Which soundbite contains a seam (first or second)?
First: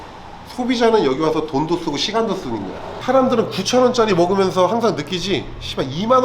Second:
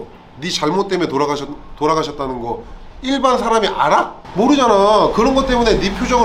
first